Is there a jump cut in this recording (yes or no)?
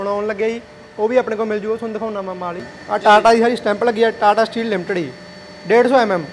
yes